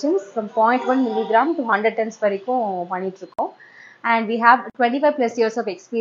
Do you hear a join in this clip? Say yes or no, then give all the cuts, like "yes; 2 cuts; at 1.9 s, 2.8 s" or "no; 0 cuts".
no; 0 cuts